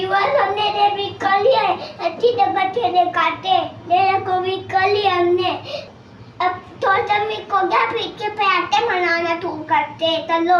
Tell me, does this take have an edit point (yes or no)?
no